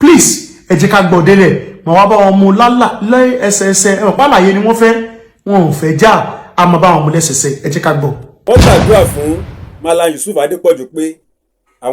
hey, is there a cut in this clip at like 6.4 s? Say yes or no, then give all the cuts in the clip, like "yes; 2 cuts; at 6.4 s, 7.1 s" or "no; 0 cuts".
no; 1 cut; at 8.3 s